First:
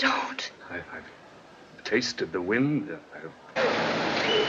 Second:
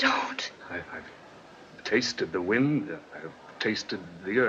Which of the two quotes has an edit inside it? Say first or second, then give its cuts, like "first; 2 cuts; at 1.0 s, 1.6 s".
second; 1 cut; at 3.4 s